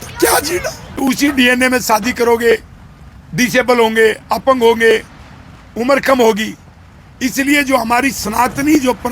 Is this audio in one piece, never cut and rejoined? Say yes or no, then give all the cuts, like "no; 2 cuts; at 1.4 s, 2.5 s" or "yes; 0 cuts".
no; 1 cut; at 1.0 s